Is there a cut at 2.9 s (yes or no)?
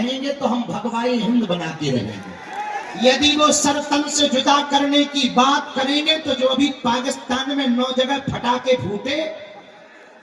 yes